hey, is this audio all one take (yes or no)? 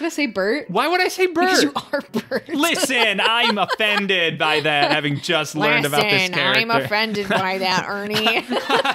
yes